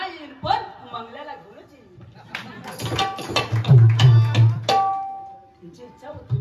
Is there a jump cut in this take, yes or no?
no